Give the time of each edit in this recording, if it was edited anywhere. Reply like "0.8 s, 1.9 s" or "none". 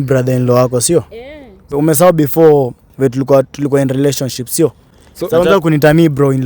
1.7 s